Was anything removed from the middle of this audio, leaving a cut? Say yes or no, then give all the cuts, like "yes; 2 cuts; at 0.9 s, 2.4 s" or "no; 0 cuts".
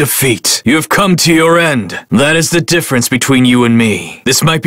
yes; 1 cut; at 2.0 s